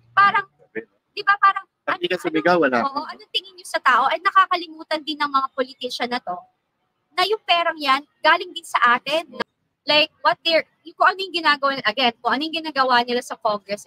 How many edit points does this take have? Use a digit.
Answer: 1